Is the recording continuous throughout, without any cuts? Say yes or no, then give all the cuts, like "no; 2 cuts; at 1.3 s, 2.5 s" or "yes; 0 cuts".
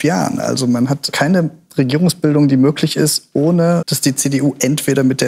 no; 1 cut; at 1.1 s